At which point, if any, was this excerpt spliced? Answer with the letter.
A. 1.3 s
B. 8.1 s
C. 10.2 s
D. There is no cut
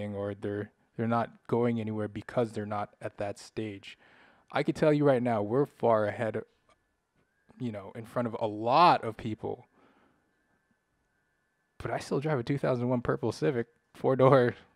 D